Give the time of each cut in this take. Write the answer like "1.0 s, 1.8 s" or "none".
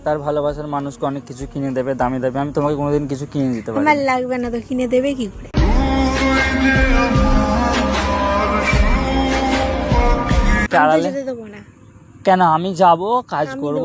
10.7 s